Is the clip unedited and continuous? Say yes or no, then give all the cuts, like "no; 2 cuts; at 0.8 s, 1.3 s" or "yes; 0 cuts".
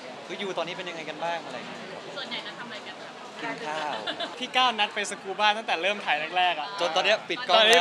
no; 1 cut; at 4.3 s